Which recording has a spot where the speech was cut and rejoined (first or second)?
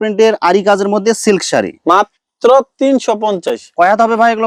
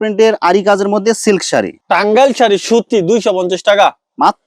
second